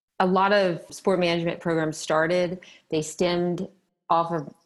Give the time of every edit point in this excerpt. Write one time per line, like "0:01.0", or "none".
0:00.9

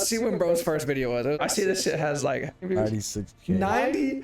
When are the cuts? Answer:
0:01.4
0:02.6

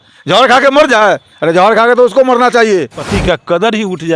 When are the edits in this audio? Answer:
0:03.0

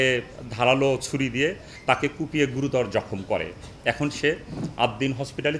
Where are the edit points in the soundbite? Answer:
none

